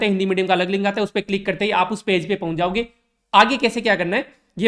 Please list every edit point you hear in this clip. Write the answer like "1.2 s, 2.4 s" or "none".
none